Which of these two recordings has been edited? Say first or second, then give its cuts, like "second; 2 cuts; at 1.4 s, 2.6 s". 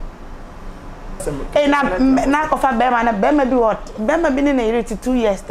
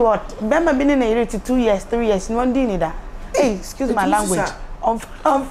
first; 1 cut; at 1.3 s